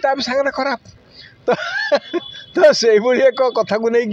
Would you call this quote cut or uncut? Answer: uncut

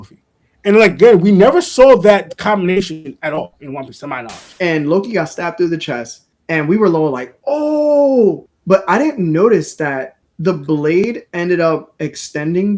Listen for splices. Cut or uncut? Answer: cut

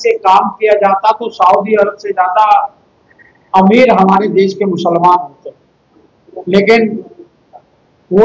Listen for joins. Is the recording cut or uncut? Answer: uncut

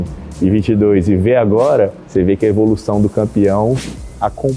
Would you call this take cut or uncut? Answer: uncut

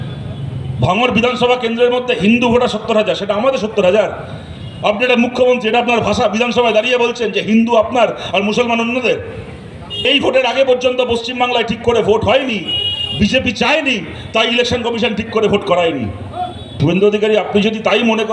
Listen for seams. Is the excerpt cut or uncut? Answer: cut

